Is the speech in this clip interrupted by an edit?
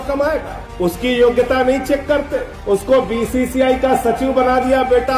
no; 0 cuts

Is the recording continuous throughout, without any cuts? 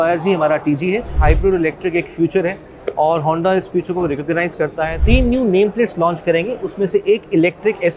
no; 2 cuts; at 1.1 s, 5.0 s

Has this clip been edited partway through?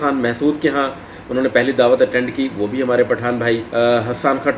yes; 1 cut; at 3.7 s

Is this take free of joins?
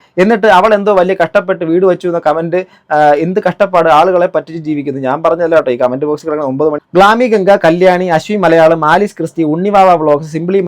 no; 1 cut; at 6.8 s

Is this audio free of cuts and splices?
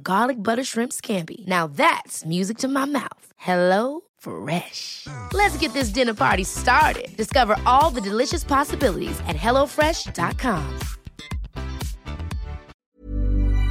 no; 1 cut; at 12.7 s

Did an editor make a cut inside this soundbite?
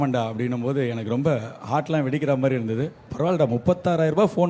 yes; 1 cut; at 3.0 s

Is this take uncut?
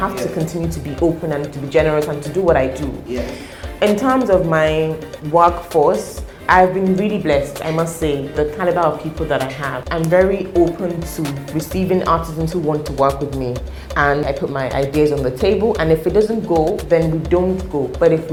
yes; 0 cuts

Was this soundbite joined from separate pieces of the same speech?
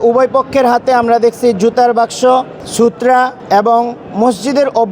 yes; 1 cut; at 3.1 s

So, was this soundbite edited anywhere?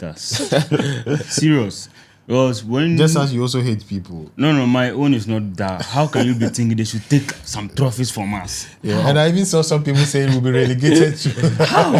no; 0 cuts

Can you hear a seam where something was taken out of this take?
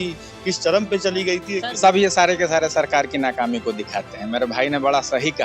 yes; 1 cut; at 1.7 s

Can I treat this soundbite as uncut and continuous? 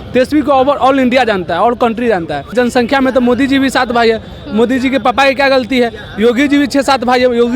no; 1 cut; at 2.5 s

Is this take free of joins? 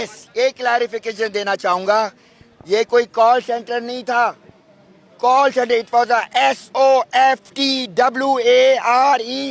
yes; 0 cuts

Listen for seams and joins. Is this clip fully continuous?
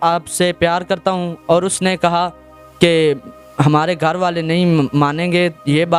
yes; 0 cuts

